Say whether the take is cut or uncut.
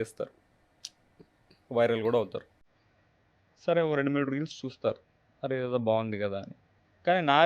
uncut